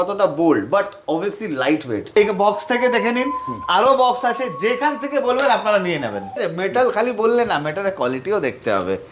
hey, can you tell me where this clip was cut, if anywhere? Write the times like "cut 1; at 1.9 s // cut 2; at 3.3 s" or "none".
cut 1; at 2.1 s // cut 2; at 6.4 s